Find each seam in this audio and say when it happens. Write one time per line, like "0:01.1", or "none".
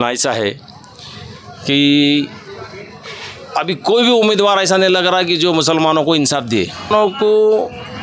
0:06.9